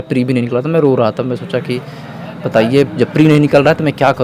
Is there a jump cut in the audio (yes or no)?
no